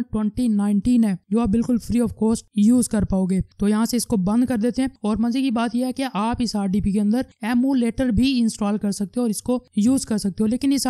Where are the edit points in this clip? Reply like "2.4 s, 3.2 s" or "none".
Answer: none